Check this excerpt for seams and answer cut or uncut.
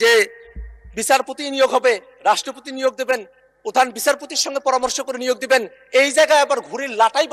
uncut